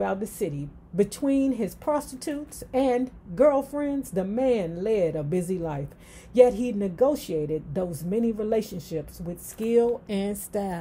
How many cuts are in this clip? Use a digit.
0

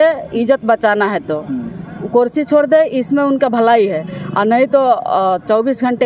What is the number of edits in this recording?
0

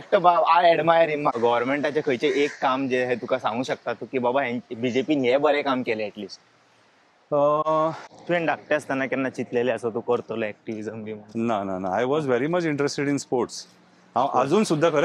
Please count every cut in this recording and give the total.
2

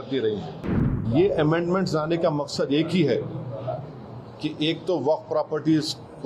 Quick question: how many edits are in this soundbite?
1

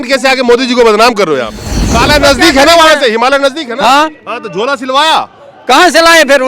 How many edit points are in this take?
1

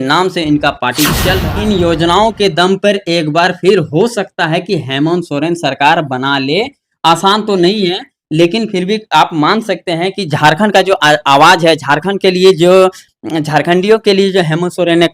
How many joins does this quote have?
1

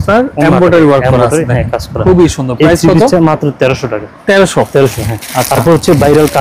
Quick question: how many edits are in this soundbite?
0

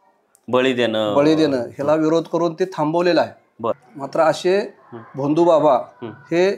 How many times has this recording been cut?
1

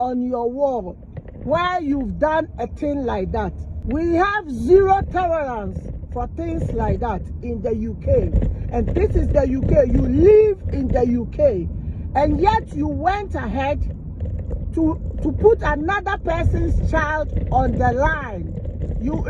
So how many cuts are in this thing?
1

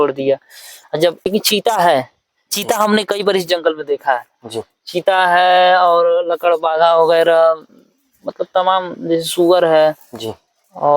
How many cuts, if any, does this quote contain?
1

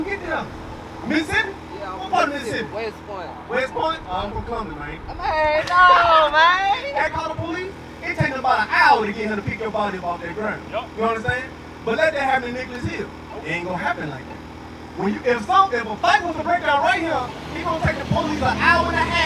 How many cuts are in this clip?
1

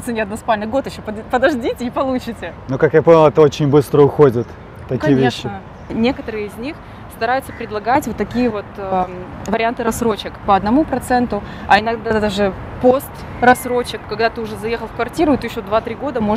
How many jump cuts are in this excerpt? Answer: 2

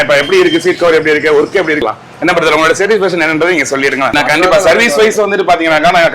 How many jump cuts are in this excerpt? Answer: 2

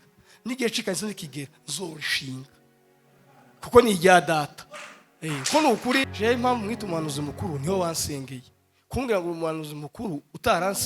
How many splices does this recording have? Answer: 1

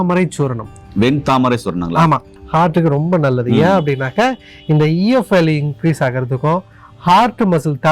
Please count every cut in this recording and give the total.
1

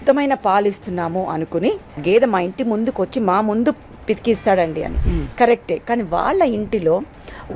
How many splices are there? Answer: 1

